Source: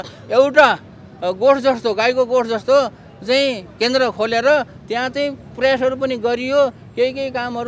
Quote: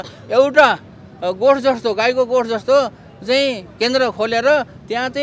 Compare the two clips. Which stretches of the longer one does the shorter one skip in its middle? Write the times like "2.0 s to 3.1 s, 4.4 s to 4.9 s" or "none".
none